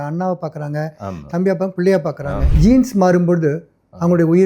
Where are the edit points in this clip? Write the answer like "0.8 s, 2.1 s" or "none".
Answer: 2.4 s